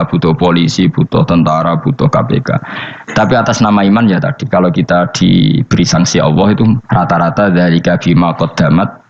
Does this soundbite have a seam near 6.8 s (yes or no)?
yes